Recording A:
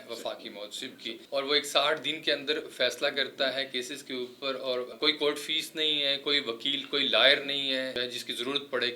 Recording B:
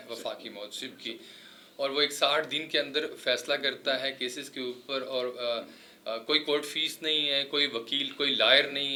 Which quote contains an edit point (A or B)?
A